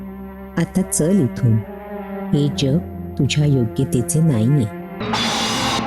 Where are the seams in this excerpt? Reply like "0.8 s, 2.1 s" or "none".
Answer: 4.9 s